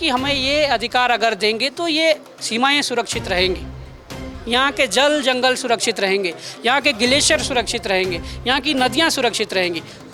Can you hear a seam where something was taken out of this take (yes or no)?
no